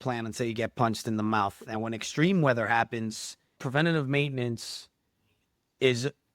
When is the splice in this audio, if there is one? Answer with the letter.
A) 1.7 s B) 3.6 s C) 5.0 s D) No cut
B